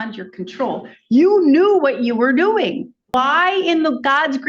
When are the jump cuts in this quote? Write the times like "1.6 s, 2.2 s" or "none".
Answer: 3.1 s